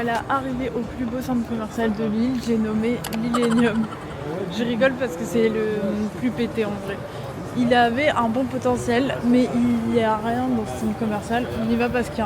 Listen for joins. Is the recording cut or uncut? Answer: uncut